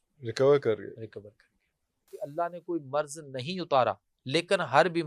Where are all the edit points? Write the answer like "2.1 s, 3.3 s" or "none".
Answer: 2.2 s